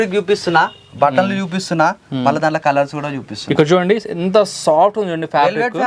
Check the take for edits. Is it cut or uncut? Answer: uncut